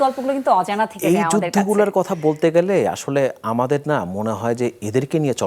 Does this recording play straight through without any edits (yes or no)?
yes